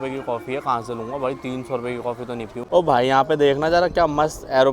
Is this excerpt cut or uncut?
cut